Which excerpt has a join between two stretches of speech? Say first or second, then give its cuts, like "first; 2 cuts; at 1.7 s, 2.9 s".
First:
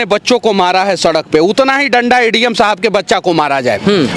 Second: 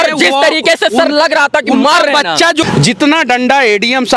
second; 1 cut; at 2.6 s